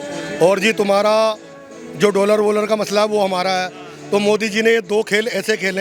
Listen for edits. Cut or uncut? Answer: uncut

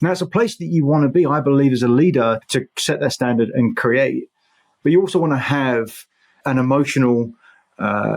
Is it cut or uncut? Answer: cut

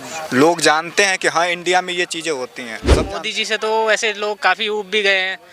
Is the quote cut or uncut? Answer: cut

